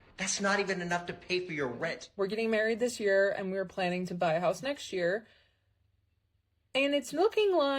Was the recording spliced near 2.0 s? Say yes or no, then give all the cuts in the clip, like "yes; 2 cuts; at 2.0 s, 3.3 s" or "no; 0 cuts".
yes; 1 cut; at 2.0 s